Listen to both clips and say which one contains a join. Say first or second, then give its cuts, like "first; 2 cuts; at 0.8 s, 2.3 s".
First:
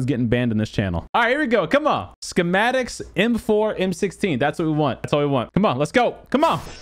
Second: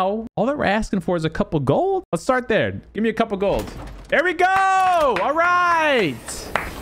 first; 2 cuts; at 1.0 s, 5.3 s